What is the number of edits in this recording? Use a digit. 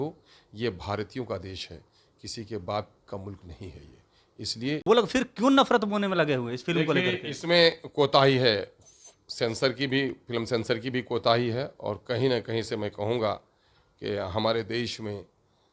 1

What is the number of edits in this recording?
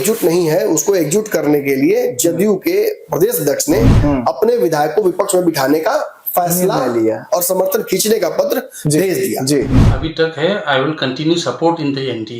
1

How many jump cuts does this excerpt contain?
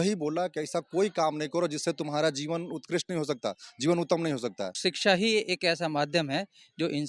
1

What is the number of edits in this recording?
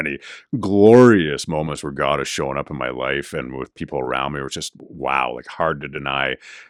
0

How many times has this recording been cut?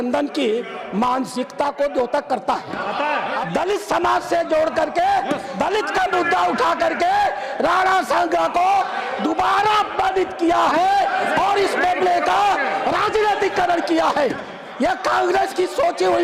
1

